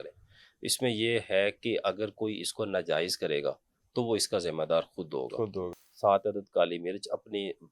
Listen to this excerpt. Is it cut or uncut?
cut